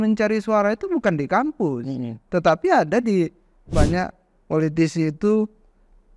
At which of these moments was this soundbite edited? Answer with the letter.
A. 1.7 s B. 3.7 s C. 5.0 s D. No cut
B